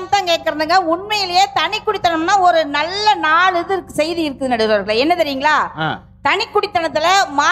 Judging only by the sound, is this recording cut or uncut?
uncut